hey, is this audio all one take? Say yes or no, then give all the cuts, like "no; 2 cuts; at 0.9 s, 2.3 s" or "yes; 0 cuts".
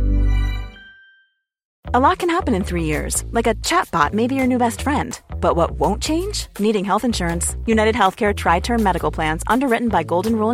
no; 1 cut; at 1.8 s